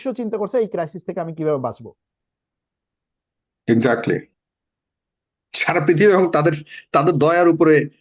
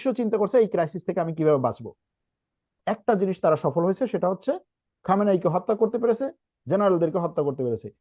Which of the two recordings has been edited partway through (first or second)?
second